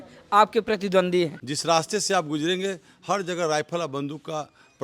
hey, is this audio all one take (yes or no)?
no